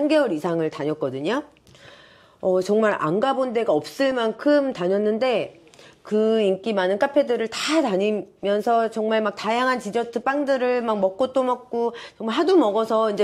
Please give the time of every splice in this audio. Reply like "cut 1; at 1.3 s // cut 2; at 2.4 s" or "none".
none